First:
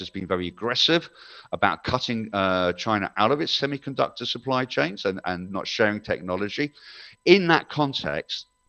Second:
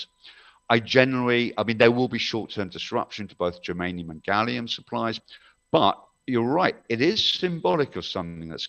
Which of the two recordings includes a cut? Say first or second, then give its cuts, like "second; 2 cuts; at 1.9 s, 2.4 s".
second; 1 cut; at 5.2 s